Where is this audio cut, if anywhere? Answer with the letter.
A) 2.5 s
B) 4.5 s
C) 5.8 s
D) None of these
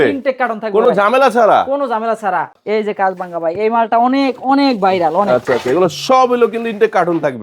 A